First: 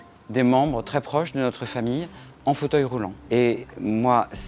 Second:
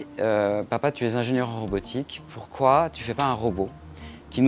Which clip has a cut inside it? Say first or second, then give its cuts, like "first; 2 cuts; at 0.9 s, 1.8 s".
first; 1 cut; at 3.2 s